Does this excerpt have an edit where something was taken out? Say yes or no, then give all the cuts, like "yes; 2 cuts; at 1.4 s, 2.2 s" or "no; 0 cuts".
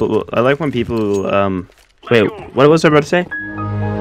no; 0 cuts